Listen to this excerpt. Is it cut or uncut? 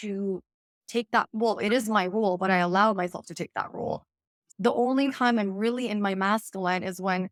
uncut